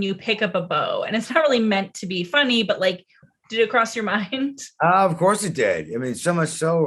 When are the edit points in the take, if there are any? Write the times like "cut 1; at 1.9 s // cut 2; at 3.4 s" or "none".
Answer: cut 1; at 3.2 s